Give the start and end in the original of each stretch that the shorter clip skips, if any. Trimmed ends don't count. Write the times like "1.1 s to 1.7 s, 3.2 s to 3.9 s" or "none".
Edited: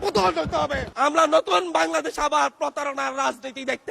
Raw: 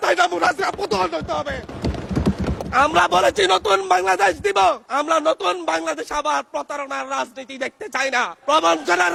1.7 s to 4.8 s